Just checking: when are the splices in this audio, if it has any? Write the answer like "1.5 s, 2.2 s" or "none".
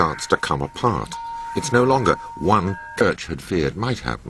none